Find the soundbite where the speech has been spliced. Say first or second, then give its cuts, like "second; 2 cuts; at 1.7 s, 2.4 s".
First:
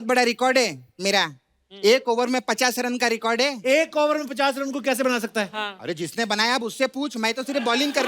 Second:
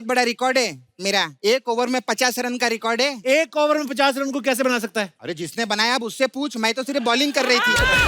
second; 2 cuts; at 1.3 s, 5.1 s